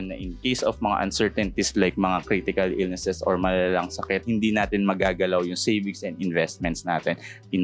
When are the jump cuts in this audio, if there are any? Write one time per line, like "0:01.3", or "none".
0:04.2